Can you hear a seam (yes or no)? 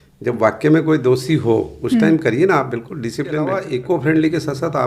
yes